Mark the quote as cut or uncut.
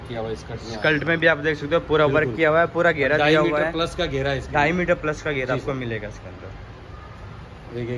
uncut